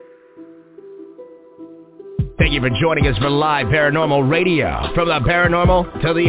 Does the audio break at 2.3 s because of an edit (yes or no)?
no